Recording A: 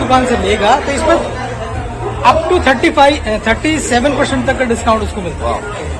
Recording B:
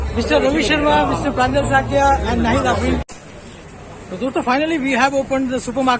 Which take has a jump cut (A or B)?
B